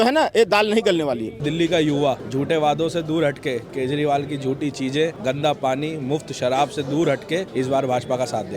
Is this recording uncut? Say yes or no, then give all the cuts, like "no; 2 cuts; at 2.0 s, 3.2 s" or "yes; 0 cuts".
no; 4 cuts; at 1.4 s, 2.2 s, 5.2 s, 7.5 s